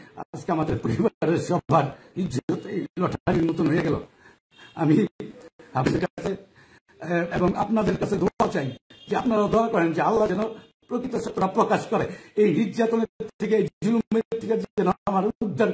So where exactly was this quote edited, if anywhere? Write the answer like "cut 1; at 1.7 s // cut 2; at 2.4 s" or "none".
none